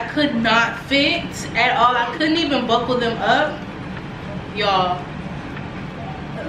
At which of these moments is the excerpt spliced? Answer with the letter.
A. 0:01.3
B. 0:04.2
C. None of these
C